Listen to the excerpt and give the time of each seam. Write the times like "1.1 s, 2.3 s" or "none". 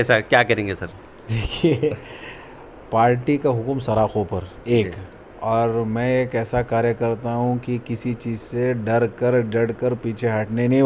none